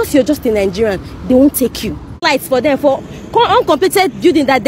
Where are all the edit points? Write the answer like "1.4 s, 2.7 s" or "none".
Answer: 2.2 s